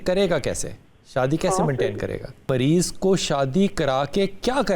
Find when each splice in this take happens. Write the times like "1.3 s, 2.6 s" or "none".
2.5 s